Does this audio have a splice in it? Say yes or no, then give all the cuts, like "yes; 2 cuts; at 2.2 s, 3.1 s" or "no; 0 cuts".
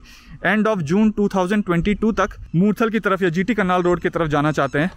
yes; 1 cut; at 2.4 s